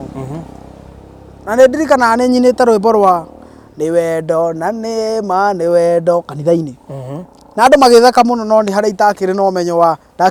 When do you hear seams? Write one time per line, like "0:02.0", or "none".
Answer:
none